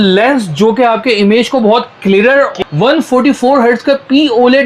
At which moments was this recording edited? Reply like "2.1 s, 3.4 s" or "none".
2.5 s

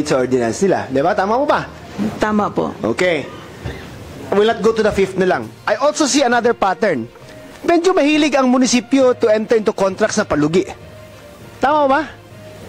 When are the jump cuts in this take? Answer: none

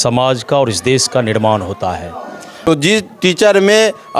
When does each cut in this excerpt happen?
2.5 s

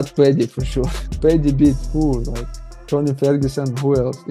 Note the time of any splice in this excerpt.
1.0 s

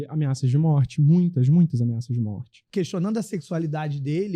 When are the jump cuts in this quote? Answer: 2.6 s

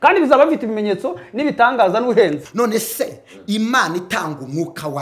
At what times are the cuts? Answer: 2.5 s

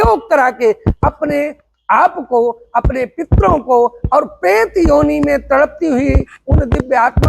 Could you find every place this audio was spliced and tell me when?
none

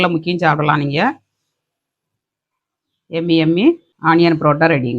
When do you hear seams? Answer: 3.9 s

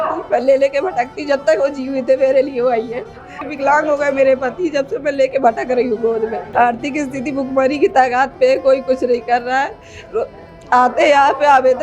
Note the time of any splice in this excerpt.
3.4 s, 6.4 s

